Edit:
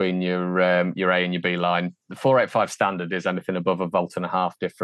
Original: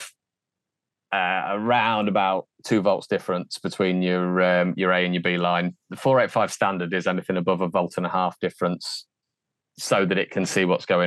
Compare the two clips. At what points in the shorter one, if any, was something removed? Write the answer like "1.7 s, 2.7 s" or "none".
none